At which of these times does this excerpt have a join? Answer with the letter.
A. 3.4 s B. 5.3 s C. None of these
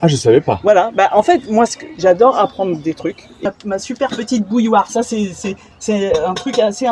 A